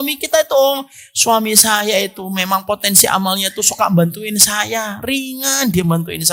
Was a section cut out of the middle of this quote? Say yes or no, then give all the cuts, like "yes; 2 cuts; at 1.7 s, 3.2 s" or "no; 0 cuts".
no; 0 cuts